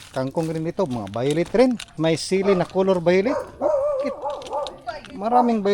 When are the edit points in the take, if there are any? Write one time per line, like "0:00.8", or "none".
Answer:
0:01.9

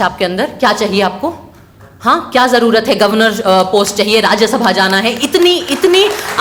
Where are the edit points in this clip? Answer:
none

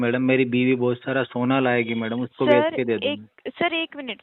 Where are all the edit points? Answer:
none

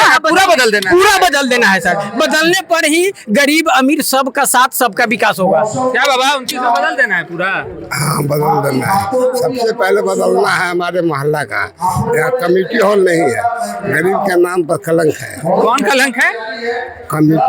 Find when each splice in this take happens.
none

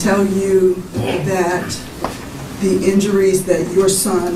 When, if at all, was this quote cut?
none

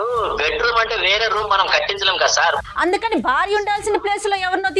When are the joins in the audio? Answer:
none

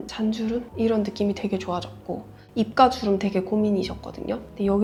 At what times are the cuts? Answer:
none

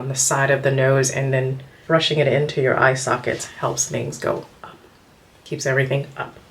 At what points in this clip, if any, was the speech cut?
0:01.7

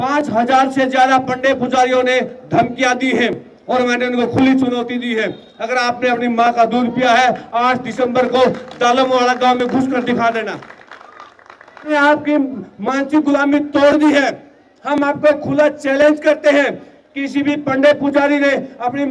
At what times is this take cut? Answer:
0:11.9

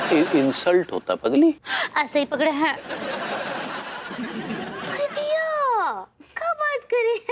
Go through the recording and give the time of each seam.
0:04.0

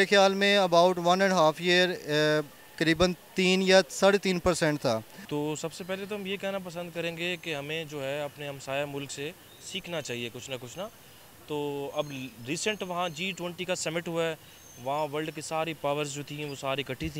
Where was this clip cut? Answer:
0:05.2

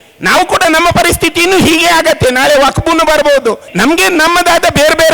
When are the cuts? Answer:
0:03.7

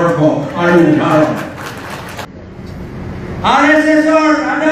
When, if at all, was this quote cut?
0:02.3

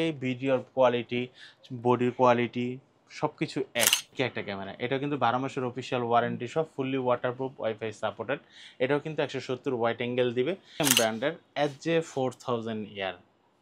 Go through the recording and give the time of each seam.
0:04.1
0:10.8

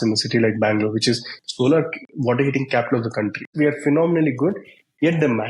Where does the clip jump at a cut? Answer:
0:03.4

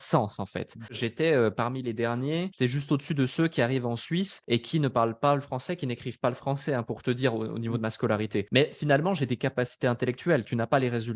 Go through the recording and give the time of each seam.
0:01.0
0:02.5
0:04.4
0:08.5

